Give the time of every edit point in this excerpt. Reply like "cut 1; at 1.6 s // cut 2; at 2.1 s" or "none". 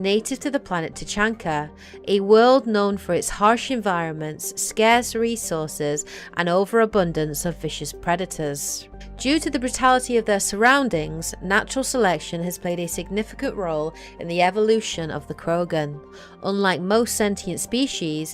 cut 1; at 4.7 s